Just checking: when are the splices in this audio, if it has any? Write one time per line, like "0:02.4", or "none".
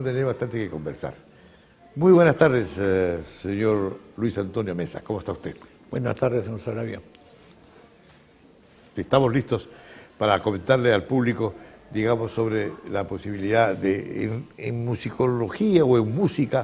0:13.7